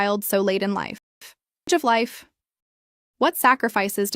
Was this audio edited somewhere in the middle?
yes; 1 cut; at 1.7 s

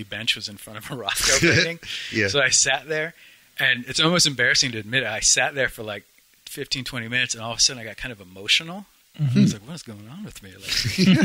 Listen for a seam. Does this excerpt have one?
no; 0 cuts

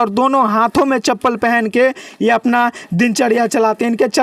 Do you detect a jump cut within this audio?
no; 0 cuts

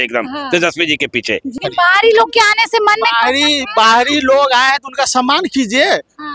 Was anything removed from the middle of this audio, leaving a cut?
yes; 1 cut; at 1.5 s

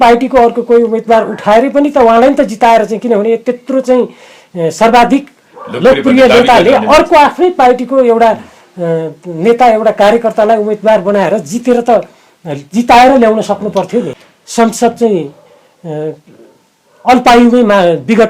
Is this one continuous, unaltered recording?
no; 1 cut; at 14.1 s

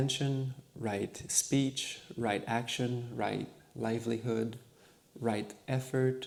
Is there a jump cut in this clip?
no; 0 cuts

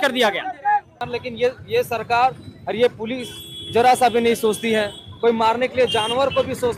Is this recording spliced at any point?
yes; 1 cut; at 1.0 s

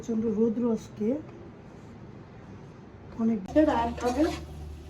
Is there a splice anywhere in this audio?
yes; 1 cut; at 3.4 s

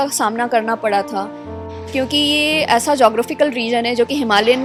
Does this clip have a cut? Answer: no; 0 cuts

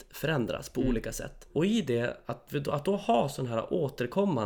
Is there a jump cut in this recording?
yes; 1 cut; at 1.4 s

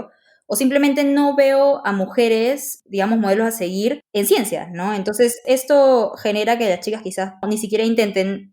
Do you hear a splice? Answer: yes; 4 cuts; at 2.7 s, 4.0 s, 5.4 s, 7.4 s

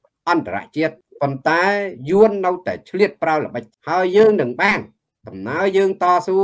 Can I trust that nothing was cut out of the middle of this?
no; 2 cuts; at 1.0 s, 3.7 s

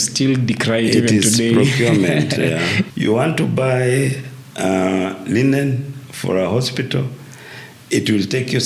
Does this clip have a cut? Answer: yes; 1 cut; at 2.9 s

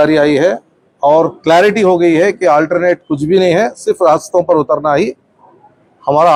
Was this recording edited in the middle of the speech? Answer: no; 0 cuts

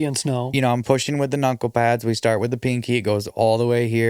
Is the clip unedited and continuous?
yes; 0 cuts

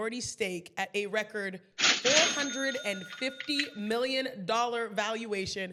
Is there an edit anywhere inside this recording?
no; 0 cuts

